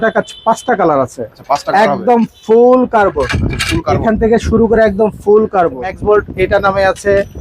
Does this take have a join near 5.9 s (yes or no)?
yes